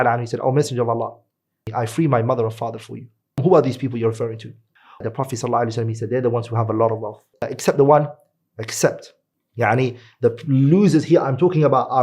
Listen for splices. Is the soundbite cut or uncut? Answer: cut